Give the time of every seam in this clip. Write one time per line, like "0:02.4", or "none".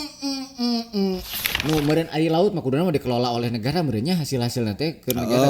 0:01.3